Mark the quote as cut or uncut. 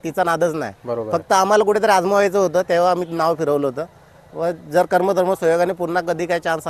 uncut